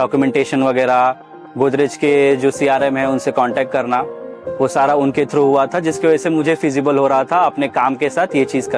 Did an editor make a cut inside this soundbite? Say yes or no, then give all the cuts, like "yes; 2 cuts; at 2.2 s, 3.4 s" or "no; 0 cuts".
no; 0 cuts